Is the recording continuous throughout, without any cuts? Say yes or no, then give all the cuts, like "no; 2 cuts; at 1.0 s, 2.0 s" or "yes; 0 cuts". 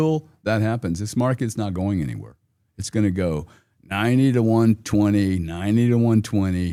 yes; 0 cuts